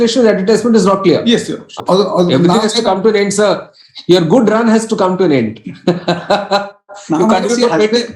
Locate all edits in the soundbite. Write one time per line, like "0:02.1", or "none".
0:01.8

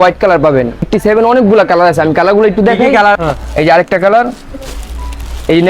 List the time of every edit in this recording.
0:00.9
0:03.2

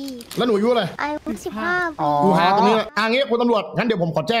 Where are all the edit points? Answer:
0:01.0
0:02.9

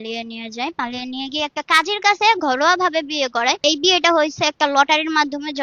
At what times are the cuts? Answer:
0:03.6

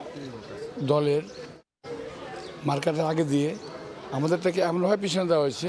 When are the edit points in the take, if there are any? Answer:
none

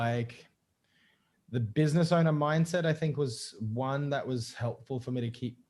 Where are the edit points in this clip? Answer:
none

